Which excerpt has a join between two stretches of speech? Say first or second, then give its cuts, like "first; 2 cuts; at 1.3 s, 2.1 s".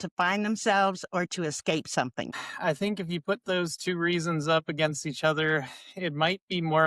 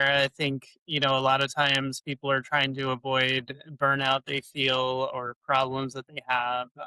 first; 1 cut; at 2.4 s